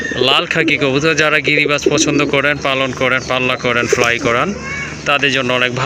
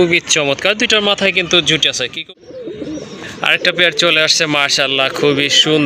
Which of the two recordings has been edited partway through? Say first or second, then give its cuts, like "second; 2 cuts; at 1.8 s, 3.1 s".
second; 1 cut; at 2.1 s